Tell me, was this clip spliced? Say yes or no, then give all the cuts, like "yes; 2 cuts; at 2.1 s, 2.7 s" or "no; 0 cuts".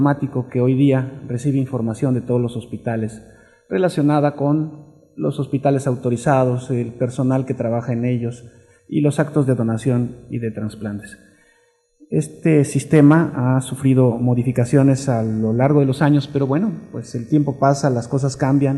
yes; 1 cut; at 9.6 s